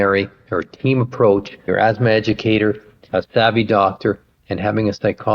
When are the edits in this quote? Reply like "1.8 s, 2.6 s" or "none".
1.6 s, 3.1 s